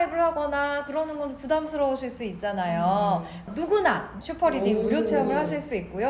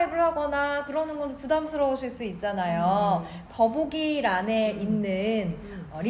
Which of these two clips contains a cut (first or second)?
first